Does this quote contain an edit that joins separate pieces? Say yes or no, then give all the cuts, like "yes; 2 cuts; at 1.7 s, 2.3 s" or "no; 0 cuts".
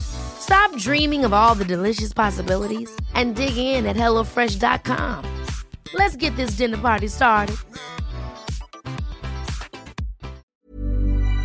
yes; 1 cut; at 10.6 s